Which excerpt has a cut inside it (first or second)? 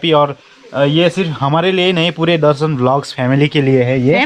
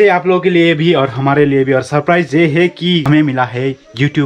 second